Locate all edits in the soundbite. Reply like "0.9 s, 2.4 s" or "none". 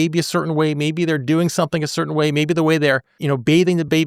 3.1 s